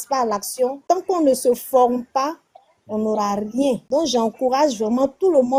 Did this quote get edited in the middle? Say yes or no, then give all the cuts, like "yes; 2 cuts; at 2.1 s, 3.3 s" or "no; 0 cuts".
no; 0 cuts